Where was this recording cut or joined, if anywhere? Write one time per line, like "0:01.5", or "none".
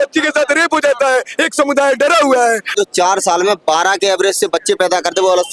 0:02.7